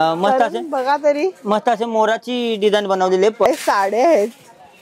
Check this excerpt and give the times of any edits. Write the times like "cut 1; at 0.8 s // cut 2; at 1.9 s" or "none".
cut 1; at 3.4 s